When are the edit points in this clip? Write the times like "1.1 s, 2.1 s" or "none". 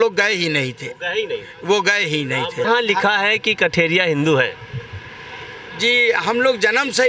2.6 s